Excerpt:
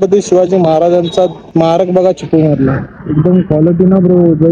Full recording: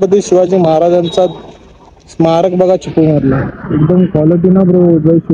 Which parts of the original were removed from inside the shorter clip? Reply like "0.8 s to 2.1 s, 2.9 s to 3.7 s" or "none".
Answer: 1.4 s to 2.1 s